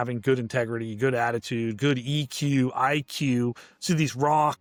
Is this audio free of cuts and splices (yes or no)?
yes